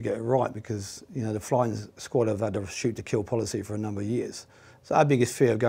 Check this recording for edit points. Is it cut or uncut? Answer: cut